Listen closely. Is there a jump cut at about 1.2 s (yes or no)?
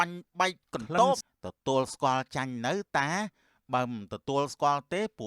yes